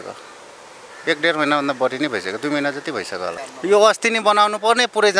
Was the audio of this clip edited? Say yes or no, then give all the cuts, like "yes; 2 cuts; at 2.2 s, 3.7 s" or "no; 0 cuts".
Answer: yes; 1 cut; at 3.5 s